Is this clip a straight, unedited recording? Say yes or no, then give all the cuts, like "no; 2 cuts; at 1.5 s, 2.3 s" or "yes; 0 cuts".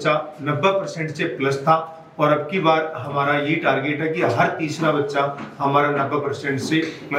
yes; 0 cuts